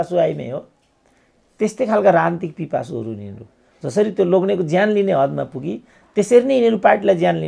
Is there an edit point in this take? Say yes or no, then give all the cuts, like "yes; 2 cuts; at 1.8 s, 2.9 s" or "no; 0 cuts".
no; 0 cuts